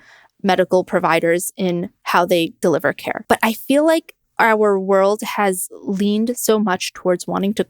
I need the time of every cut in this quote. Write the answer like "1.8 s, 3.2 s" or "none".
none